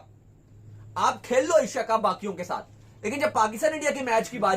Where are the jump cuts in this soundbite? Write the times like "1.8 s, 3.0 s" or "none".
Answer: none